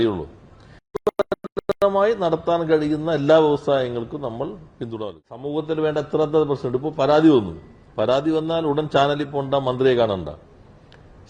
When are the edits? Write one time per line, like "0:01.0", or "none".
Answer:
0:05.5

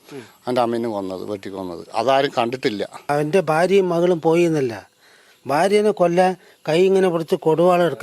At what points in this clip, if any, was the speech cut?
0:03.1

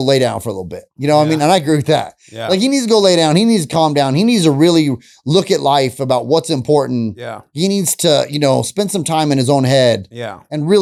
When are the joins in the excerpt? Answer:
none

